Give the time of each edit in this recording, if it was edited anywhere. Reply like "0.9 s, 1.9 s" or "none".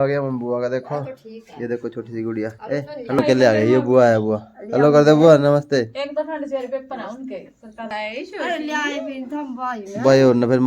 3.2 s, 7.9 s